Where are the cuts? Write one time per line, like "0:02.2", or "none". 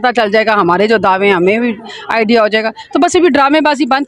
none